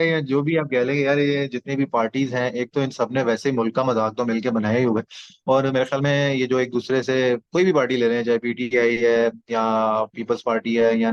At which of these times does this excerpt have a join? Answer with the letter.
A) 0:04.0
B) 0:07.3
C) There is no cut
C